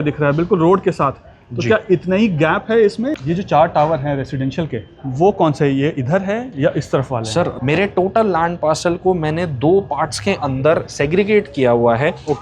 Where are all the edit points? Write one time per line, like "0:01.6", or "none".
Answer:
0:03.1
0:07.6